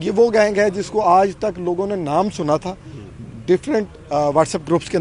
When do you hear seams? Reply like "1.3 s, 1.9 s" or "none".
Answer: none